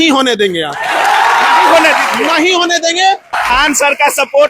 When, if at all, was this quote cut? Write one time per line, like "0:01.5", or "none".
0:03.4